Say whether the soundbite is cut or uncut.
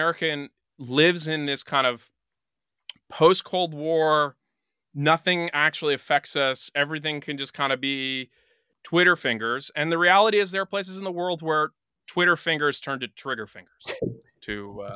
cut